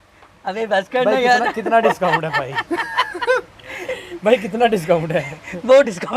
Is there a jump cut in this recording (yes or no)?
no